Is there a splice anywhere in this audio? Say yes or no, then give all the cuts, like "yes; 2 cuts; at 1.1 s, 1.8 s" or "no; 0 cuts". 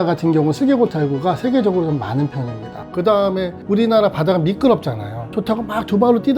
yes; 2 cuts; at 2.8 s, 5.3 s